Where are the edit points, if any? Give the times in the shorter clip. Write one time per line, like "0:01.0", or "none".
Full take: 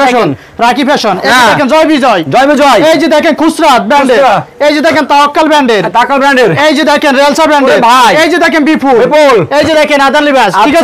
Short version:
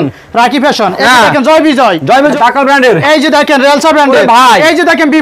0:02.3